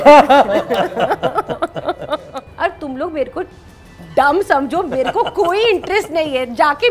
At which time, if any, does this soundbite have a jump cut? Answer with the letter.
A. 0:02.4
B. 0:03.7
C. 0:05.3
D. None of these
A